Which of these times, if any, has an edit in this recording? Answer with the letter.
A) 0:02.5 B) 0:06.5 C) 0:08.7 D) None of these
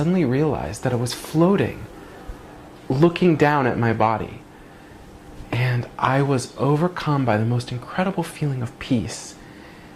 D